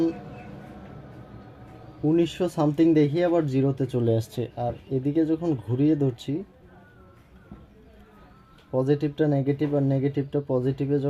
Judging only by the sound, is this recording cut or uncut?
uncut